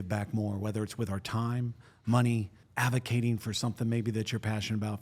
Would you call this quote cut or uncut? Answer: cut